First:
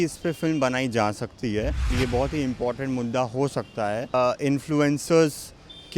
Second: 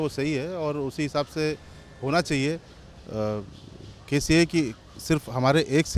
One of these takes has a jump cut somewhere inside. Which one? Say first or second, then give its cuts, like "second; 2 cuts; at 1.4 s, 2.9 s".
first; 2 cuts; at 1.9 s, 4.1 s